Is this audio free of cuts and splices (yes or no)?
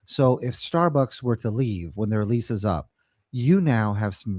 yes